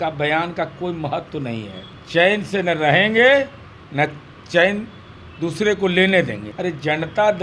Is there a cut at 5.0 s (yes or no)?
no